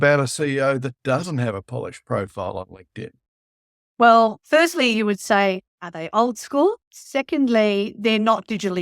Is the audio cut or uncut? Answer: cut